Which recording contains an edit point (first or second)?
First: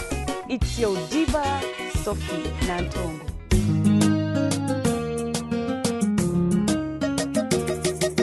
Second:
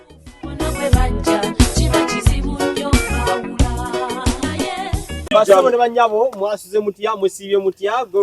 second